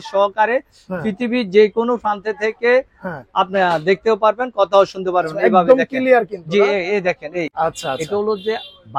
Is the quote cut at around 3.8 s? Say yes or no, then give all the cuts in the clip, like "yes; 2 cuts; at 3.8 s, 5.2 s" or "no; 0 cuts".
no; 1 cut; at 7.5 s